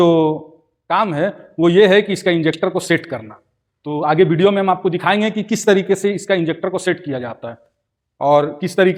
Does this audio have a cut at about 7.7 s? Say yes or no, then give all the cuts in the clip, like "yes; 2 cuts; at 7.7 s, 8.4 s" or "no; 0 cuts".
no; 0 cuts